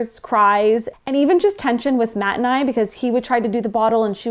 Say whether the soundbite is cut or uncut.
uncut